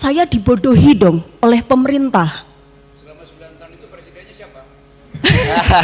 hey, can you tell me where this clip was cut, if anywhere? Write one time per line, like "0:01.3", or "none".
none